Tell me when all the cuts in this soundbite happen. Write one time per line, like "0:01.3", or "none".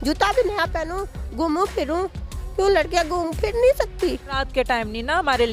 none